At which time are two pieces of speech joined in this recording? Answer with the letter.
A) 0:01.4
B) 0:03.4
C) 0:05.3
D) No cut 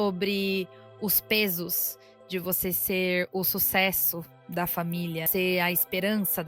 C